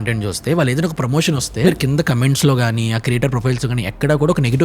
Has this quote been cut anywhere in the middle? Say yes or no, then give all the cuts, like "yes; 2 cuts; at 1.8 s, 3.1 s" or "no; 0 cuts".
yes; 1 cut; at 1.6 s